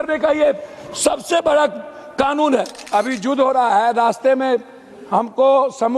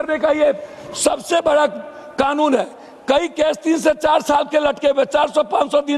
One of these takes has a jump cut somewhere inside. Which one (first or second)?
first